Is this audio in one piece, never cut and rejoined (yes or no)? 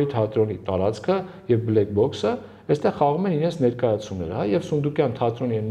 yes